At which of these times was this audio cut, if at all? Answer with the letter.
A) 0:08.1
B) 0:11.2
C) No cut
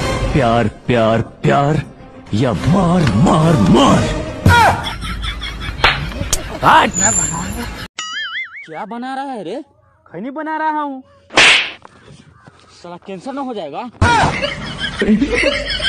A